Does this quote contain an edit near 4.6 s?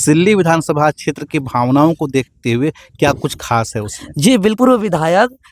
yes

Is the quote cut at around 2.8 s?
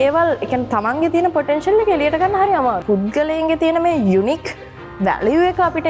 yes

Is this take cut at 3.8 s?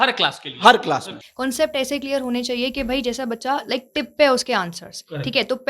no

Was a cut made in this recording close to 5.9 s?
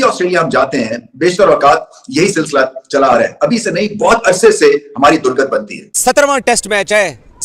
yes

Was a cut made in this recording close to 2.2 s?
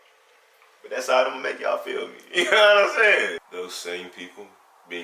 no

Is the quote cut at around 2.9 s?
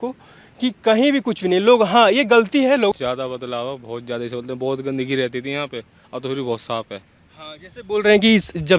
yes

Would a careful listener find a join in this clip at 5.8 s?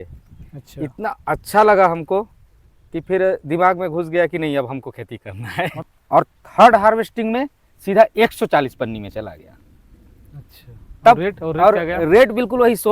yes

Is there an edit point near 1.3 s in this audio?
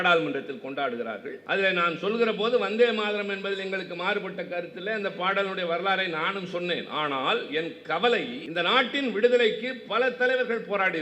yes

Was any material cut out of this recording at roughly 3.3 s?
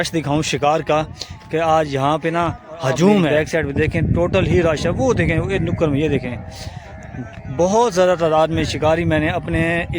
yes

